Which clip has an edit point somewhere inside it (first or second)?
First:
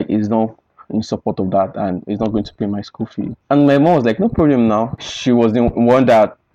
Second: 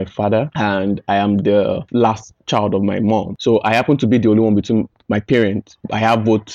second